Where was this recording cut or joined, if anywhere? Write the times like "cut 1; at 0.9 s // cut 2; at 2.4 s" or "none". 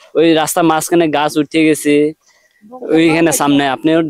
none